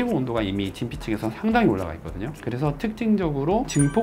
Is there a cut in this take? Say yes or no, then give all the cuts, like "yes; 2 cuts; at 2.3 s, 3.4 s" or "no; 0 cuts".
no; 0 cuts